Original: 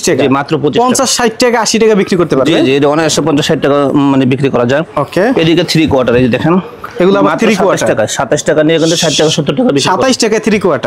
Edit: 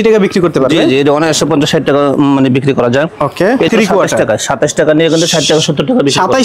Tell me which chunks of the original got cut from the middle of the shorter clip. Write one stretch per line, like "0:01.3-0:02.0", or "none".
0:05.5-0:07.4